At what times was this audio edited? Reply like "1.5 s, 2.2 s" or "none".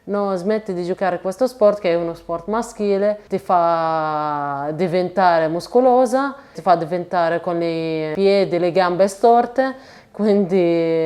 none